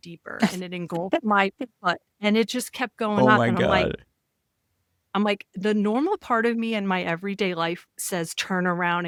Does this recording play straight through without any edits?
yes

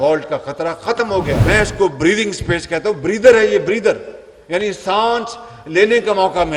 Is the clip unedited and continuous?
no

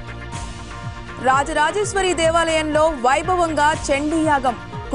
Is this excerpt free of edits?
no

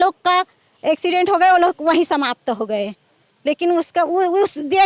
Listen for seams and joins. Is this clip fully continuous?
yes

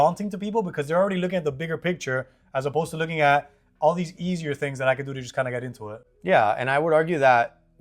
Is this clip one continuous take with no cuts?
yes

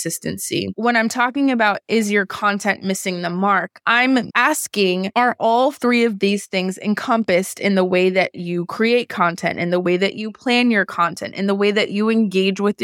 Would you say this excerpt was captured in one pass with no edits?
yes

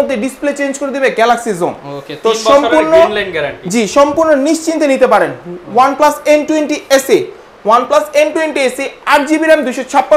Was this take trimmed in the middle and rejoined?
no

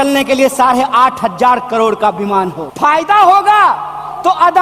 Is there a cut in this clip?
yes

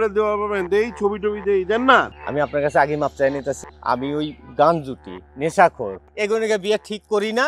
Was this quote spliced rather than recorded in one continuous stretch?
yes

